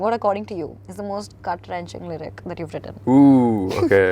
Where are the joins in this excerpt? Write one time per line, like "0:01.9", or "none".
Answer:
none